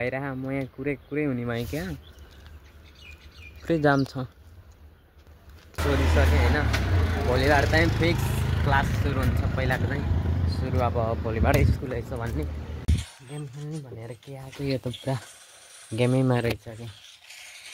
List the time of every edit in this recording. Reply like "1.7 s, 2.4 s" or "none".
5.8 s, 12.8 s